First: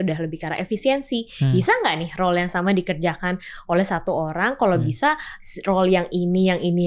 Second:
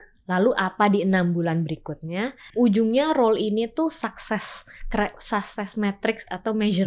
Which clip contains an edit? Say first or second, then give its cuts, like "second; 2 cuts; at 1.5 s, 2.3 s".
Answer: second; 1 cut; at 2.4 s